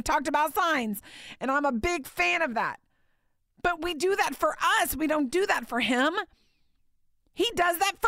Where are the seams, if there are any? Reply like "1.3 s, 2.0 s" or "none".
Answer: 3.8 s